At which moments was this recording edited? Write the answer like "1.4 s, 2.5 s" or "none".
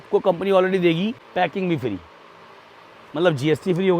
1.2 s